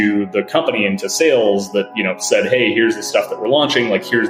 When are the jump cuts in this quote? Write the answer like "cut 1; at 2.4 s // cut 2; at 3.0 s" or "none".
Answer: none